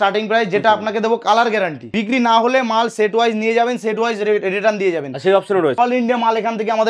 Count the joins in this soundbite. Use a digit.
2